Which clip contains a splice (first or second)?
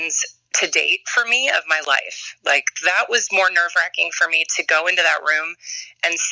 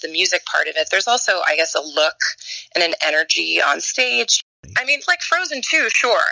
second